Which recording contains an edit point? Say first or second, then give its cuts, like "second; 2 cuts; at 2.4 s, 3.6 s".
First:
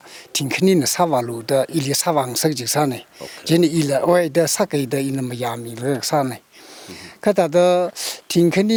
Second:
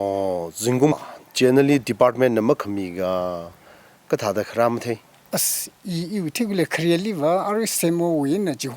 second; 1 cut; at 1.0 s